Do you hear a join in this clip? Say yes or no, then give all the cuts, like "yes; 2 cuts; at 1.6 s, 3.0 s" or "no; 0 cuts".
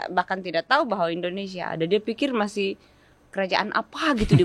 no; 0 cuts